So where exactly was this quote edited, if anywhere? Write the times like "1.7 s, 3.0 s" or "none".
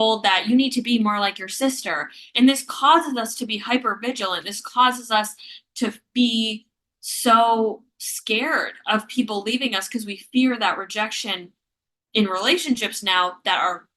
none